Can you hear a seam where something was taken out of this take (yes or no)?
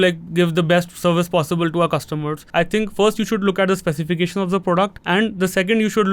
yes